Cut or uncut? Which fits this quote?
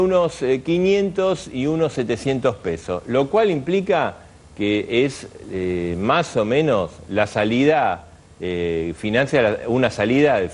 uncut